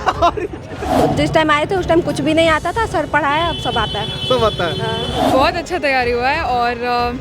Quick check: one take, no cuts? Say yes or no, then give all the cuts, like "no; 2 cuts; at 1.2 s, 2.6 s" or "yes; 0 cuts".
no; 2 cuts; at 1.0 s, 5.2 s